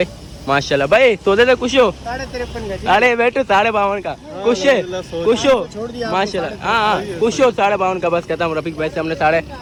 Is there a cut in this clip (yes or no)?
no